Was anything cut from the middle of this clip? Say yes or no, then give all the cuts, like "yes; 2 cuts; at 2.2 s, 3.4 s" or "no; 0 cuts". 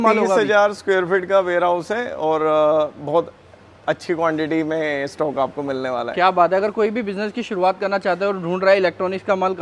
no; 0 cuts